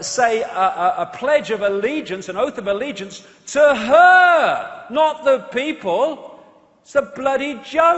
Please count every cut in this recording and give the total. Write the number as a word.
one